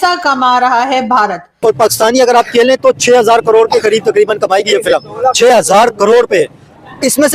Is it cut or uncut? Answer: cut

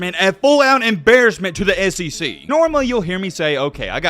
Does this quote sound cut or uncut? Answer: cut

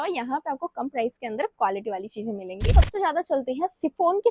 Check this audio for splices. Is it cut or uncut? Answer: cut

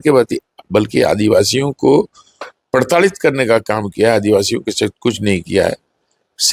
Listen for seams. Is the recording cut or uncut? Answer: uncut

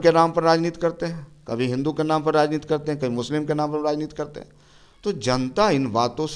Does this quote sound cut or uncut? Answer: uncut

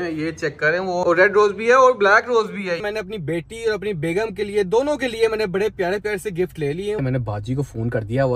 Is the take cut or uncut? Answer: cut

